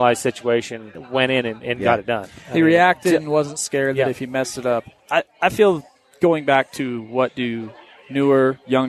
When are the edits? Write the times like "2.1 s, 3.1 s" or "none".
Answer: 1.0 s, 5.0 s